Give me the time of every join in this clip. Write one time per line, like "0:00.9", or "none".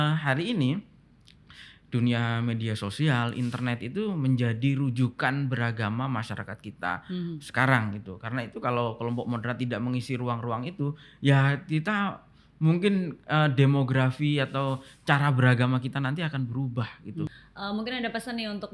0:17.4